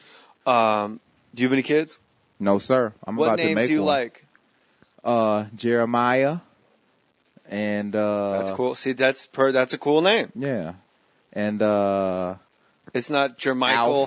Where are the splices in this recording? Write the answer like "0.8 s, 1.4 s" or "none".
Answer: none